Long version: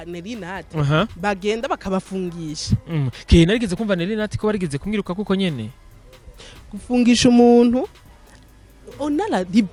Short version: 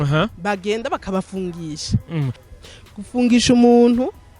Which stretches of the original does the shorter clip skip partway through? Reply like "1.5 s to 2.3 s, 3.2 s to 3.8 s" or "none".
3.2 s to 6.1 s